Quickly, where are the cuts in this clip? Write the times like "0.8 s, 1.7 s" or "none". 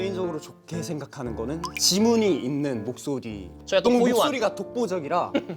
3.6 s